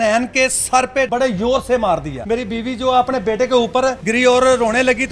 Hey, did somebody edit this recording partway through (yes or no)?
yes